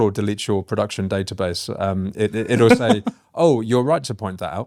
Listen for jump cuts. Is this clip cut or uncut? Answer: uncut